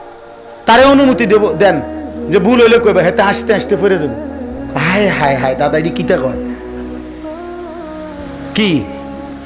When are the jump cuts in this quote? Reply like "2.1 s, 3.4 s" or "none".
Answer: none